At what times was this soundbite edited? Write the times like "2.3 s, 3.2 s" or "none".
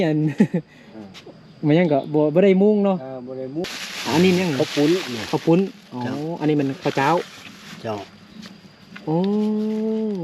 3.6 s